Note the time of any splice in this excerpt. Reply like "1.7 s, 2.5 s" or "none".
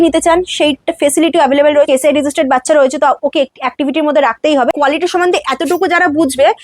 1.9 s, 4.7 s